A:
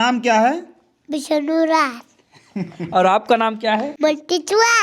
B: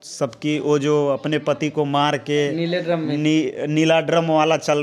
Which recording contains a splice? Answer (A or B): A